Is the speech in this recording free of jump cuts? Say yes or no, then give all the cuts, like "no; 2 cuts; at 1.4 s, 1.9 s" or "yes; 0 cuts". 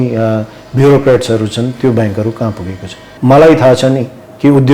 no; 1 cut; at 3.1 s